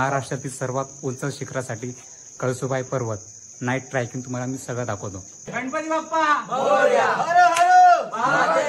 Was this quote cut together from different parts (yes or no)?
yes